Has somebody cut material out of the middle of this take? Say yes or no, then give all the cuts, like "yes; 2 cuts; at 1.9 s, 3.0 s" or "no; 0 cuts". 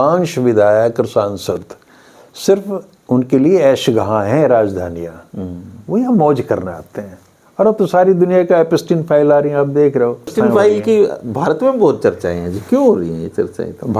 yes; 1 cut; at 10.3 s